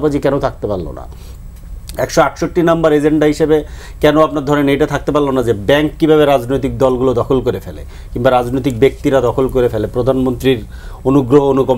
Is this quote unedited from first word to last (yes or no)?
yes